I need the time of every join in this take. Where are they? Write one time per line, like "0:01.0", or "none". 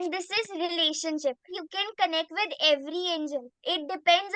0:01.6

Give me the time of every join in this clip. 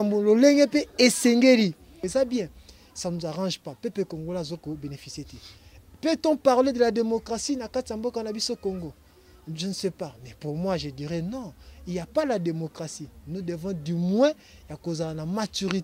0:01.9

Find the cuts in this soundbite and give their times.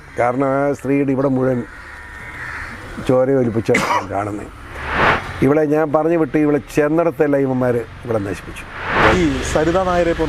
0:05.0
0:09.0

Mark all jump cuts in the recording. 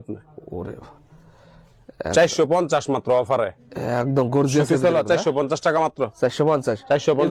none

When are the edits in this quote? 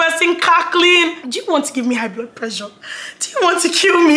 0:01.3

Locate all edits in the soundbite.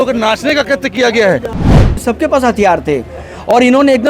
0:01.8

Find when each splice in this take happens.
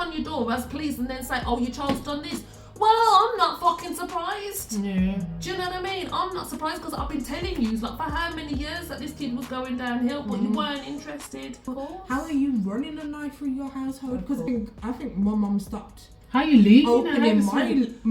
0:11.6
0:14.5

